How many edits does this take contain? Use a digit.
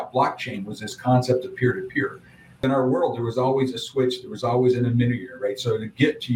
1